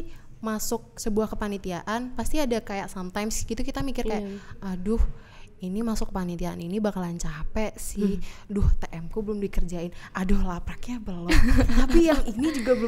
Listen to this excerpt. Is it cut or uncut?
uncut